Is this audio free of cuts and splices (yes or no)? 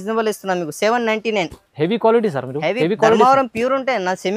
yes